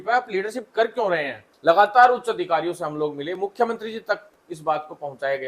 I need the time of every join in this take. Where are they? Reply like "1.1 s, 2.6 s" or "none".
1.4 s